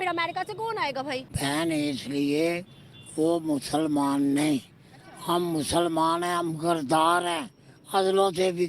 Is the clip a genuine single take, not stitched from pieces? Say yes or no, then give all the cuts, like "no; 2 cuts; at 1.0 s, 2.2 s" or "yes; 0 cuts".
no; 1 cut; at 1.3 s